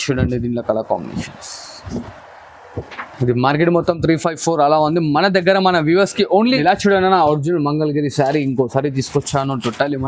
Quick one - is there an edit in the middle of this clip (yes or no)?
yes